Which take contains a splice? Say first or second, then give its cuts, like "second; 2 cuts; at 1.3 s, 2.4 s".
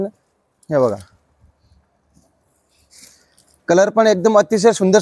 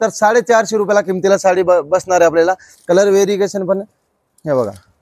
second; 1 cut; at 2.7 s